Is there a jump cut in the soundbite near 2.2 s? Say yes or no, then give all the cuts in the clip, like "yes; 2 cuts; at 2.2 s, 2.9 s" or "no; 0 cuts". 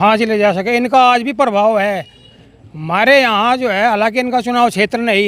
no; 0 cuts